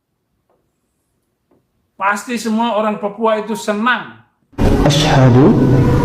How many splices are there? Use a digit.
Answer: 1